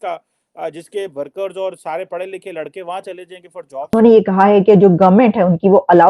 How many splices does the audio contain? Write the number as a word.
one